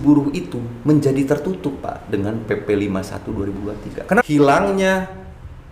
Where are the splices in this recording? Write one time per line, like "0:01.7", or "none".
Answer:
0:04.2